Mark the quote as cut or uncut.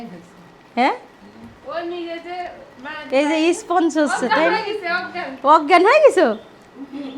uncut